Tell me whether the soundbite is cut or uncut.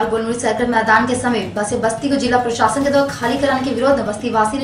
uncut